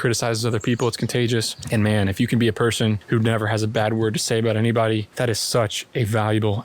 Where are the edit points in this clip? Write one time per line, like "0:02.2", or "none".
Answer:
0:01.6
0:03.0
0:05.1